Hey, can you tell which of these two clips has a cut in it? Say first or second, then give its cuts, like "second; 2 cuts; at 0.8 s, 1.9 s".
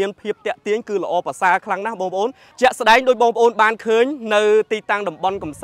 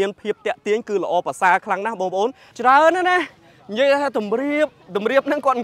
second; 1 cut; at 2.4 s